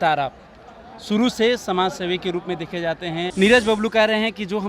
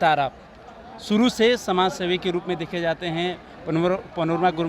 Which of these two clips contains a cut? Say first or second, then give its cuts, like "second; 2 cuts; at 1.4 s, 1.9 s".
first; 1 cut; at 3.3 s